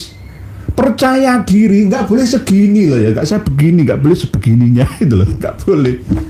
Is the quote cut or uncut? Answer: uncut